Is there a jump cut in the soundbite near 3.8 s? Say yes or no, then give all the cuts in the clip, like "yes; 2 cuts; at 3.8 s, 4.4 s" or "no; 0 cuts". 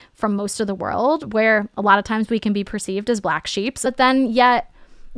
yes; 1 cut; at 3.8 s